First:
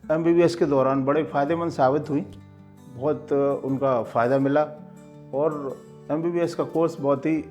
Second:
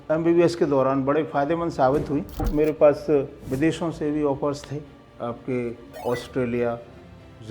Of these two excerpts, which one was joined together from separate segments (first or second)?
second